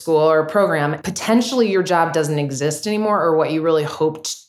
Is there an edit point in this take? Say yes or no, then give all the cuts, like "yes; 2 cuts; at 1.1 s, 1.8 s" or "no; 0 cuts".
yes; 1 cut; at 0.9 s